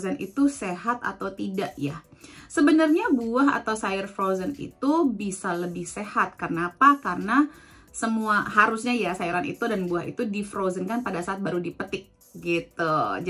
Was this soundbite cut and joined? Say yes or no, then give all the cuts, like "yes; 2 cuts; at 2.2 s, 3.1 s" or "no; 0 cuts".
no; 0 cuts